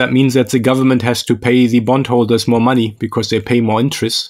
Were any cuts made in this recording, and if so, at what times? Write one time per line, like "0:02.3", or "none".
none